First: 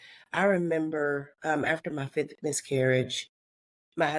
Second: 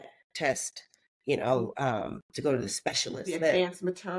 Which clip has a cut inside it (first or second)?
second